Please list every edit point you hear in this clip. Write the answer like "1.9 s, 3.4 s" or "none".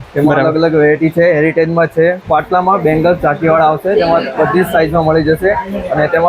2.2 s